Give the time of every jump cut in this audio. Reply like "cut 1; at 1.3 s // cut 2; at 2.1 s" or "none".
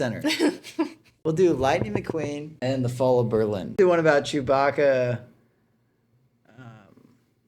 cut 1; at 1.1 s // cut 2; at 2.5 s // cut 3; at 3.8 s